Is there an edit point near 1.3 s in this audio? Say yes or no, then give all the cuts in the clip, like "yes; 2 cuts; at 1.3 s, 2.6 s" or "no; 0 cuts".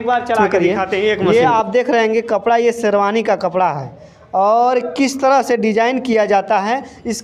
yes; 1 cut; at 1.3 s